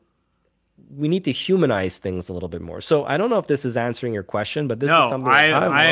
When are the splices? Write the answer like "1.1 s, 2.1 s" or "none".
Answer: none